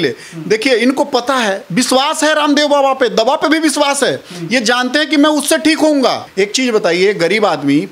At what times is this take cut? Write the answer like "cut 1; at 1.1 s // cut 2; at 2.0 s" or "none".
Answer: cut 1; at 6.2 s